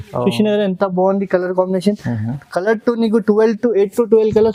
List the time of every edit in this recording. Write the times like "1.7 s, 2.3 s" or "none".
none